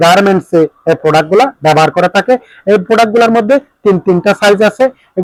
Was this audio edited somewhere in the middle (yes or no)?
no